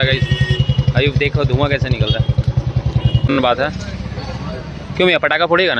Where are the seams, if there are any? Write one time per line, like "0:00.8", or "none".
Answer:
0:03.3